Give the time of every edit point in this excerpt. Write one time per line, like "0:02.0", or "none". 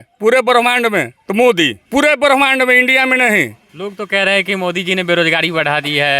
0:01.2
0:01.8
0:03.6